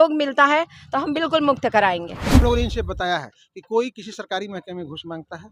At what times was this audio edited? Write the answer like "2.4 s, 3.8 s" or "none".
2.4 s